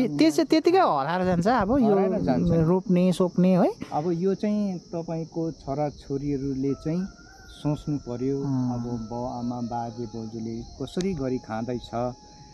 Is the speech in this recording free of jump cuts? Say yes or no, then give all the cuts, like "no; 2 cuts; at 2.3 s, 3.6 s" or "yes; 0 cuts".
yes; 0 cuts